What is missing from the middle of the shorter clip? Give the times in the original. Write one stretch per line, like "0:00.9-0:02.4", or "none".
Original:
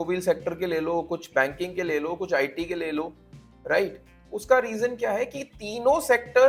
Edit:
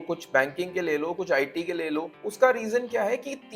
0:03.2-0:04.3